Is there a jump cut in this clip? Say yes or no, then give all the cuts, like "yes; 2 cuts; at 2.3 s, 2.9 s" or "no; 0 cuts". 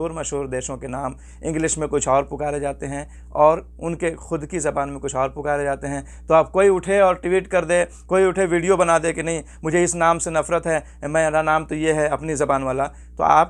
no; 0 cuts